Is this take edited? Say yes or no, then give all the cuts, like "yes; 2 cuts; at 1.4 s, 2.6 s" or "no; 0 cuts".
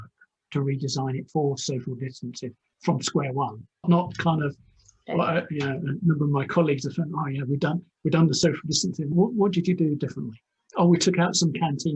no; 0 cuts